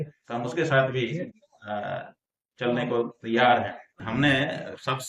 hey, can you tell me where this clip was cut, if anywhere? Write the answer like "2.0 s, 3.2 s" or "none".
4.0 s